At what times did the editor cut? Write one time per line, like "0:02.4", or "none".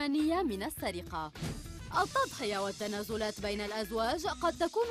0:01.8